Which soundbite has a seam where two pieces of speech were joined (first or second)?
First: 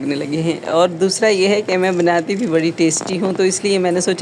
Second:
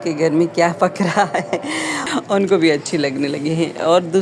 second